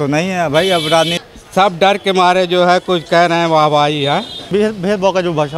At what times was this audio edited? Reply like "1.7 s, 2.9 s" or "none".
1.2 s, 4.5 s